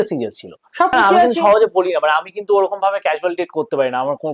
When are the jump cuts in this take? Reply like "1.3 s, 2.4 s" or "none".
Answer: 0.9 s